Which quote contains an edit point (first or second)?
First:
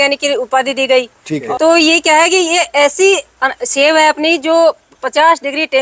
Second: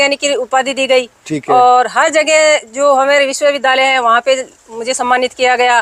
first